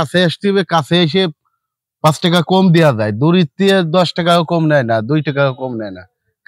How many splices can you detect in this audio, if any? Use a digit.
0